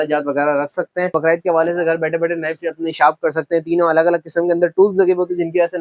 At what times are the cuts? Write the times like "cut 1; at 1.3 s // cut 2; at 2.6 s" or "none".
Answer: cut 1; at 1.2 s